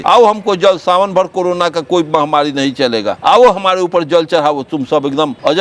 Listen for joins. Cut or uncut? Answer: uncut